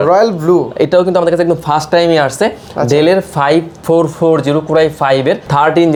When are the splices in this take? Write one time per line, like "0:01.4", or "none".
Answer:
none